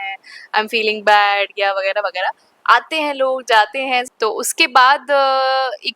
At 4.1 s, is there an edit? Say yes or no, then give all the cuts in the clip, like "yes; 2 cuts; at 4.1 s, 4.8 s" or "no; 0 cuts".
yes; 1 cut; at 4.1 s